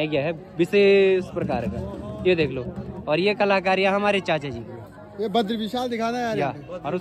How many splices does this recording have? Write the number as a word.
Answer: zero